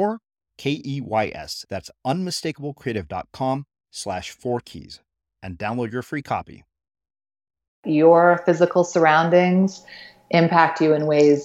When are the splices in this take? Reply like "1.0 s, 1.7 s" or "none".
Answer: 7.8 s